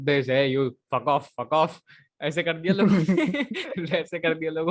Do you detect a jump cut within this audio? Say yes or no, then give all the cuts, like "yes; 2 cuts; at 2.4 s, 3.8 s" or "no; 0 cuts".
no; 0 cuts